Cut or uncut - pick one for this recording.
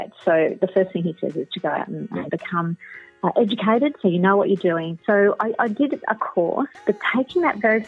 cut